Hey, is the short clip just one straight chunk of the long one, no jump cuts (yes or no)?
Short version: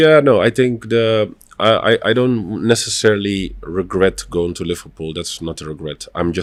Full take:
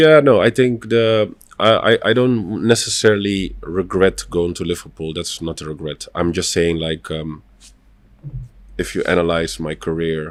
yes